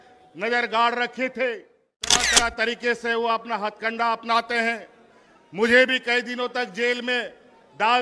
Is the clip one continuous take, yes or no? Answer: no